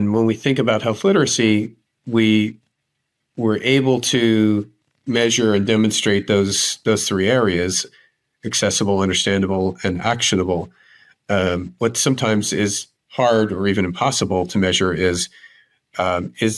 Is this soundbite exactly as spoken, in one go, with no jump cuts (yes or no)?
yes